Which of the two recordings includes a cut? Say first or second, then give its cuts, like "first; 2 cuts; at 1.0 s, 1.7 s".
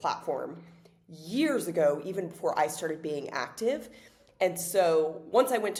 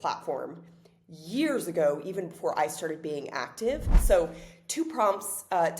second; 1 cut; at 3.9 s